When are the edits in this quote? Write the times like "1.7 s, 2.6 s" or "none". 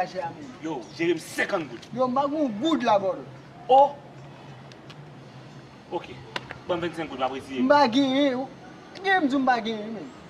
none